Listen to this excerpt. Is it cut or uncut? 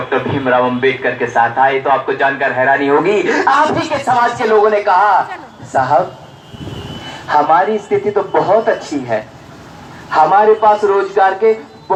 uncut